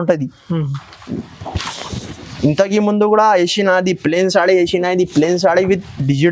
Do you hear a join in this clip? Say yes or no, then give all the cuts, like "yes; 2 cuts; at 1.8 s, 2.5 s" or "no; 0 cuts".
no; 0 cuts